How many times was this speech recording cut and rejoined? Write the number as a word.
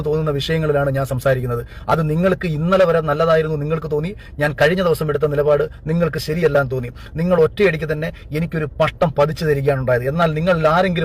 zero